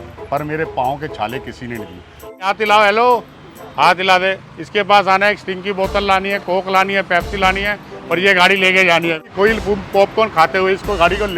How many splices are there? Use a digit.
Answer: 2